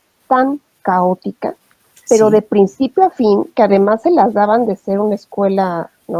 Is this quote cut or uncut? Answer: uncut